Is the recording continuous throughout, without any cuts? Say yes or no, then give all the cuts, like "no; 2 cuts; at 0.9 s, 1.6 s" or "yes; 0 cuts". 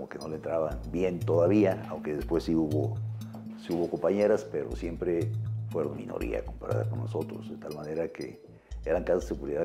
yes; 0 cuts